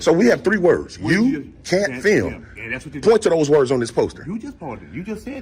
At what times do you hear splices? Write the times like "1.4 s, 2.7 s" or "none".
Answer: none